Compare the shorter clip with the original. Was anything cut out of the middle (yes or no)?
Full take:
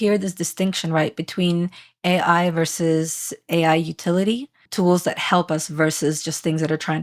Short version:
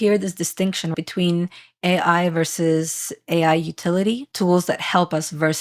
yes